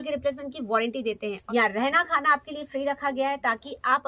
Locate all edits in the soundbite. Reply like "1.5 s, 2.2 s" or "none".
1.4 s